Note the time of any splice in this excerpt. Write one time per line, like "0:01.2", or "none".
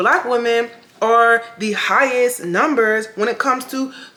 none